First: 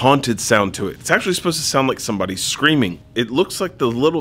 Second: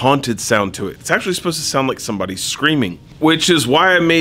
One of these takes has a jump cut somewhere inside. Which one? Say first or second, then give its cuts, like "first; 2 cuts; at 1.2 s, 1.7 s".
first; 1 cut; at 3.0 s